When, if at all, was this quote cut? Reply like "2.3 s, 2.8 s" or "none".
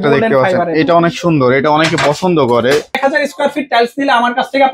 3.0 s